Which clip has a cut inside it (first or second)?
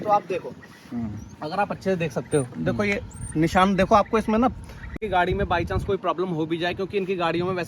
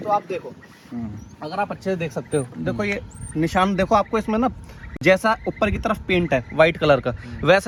first